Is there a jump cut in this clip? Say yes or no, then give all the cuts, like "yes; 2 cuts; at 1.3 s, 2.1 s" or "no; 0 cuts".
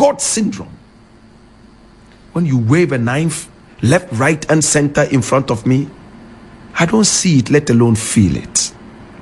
no; 0 cuts